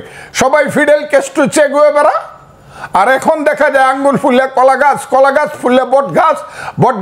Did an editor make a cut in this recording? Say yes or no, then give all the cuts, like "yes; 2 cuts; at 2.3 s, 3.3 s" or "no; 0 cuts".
no; 0 cuts